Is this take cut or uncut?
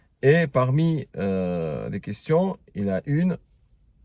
uncut